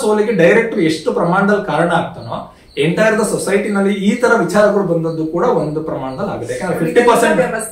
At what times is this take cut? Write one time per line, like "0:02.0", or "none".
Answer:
none